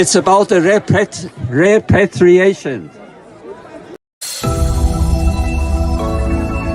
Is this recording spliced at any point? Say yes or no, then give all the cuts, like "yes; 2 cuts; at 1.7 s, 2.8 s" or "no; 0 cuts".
yes; 1 cut; at 4.3 s